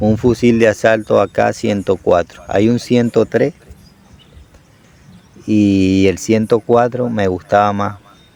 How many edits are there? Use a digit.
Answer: 0